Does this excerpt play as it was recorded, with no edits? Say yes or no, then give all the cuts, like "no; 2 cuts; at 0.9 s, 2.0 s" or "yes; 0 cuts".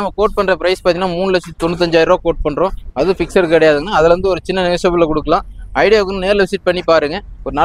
yes; 0 cuts